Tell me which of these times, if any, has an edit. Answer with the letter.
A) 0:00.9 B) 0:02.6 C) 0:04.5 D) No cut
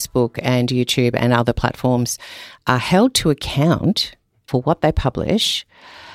C